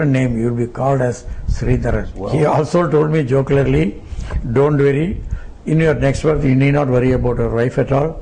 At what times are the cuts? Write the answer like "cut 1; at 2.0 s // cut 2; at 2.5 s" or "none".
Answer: cut 1; at 2.1 s